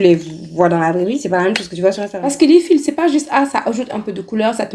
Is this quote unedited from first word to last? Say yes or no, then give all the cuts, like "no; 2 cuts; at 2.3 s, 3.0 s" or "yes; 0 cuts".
no; 1 cut; at 2.2 s